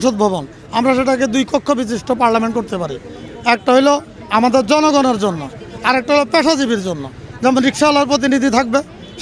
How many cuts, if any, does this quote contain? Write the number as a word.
zero